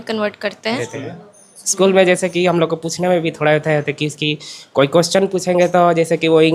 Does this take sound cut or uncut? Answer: cut